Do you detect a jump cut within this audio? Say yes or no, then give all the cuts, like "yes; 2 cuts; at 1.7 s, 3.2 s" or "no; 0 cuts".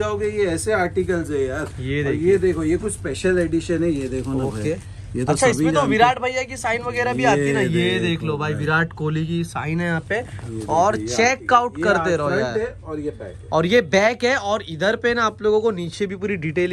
no; 0 cuts